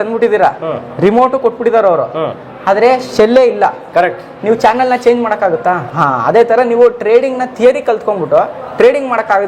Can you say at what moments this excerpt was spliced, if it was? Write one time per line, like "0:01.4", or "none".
0:05.8